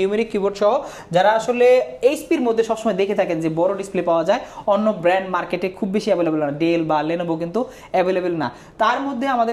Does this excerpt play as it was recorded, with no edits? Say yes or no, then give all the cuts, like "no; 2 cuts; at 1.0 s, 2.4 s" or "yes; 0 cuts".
yes; 0 cuts